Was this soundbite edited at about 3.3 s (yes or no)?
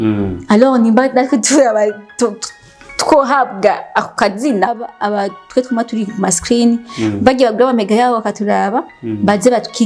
no